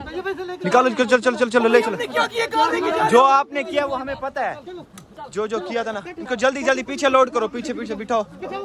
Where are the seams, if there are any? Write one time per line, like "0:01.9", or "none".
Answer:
none